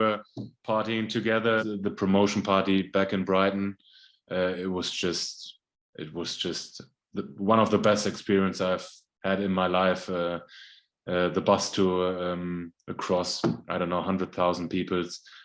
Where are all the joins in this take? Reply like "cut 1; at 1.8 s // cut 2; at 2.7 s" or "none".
cut 1; at 1.6 s